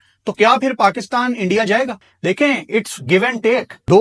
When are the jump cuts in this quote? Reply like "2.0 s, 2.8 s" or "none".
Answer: none